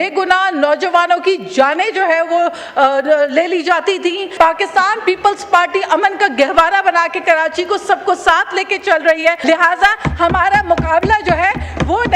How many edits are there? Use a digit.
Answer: 2